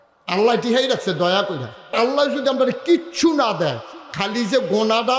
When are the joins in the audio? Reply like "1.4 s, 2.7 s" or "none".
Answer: 1.9 s